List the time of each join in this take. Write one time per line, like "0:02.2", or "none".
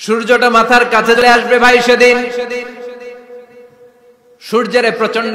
0:01.2

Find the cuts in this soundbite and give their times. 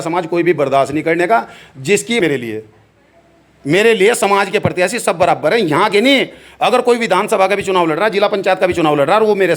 0:02.2

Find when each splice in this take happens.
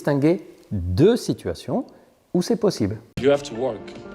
0:03.2

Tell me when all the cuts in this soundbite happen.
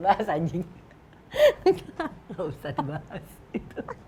none

